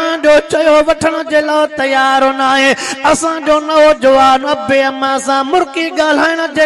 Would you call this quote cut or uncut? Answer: uncut